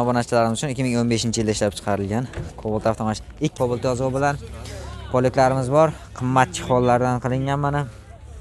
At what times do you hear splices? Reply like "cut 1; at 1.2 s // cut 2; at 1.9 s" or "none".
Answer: cut 1; at 3.5 s